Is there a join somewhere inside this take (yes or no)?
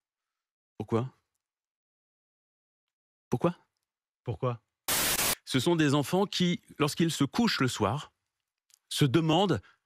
yes